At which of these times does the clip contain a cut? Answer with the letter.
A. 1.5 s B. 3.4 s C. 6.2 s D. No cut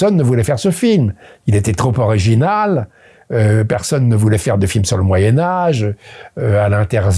D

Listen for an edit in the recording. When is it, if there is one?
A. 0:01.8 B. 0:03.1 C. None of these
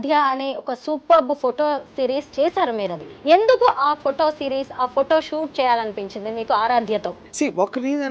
B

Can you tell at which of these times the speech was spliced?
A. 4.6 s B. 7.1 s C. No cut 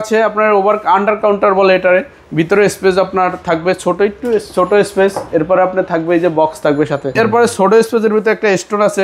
B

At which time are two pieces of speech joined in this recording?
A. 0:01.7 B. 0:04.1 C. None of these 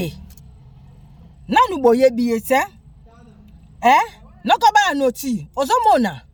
C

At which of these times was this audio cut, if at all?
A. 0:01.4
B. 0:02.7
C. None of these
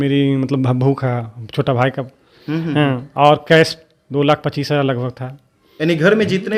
C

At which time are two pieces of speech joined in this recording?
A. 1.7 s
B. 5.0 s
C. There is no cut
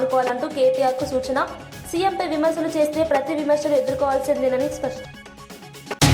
B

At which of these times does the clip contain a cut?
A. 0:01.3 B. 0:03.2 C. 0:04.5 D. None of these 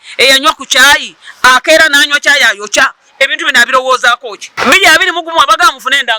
C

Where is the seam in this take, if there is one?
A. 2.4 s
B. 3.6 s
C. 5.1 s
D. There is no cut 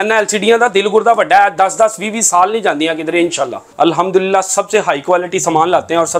B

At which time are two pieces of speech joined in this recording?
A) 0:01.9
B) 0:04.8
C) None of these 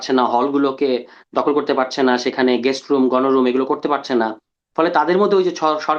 C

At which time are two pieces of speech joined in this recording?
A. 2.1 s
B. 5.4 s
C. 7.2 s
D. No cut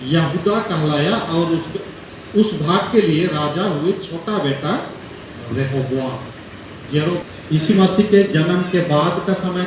C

